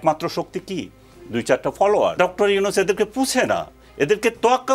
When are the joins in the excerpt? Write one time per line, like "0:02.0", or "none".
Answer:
0:02.2